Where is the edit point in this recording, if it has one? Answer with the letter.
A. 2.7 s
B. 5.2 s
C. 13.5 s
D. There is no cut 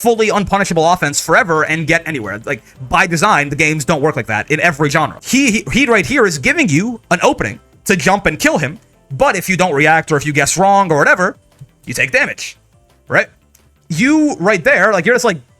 B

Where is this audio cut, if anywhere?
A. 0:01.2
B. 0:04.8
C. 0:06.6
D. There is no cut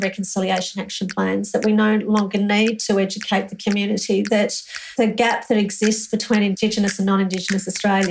B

